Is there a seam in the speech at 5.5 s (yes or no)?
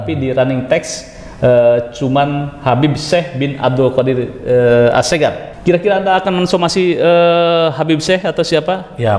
yes